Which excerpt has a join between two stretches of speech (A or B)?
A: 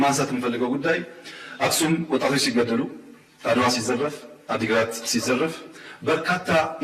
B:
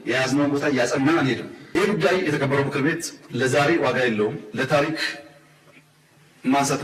B